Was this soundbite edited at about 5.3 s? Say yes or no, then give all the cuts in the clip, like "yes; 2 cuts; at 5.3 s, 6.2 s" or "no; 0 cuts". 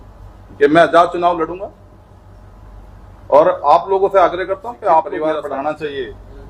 yes; 1 cut; at 5.3 s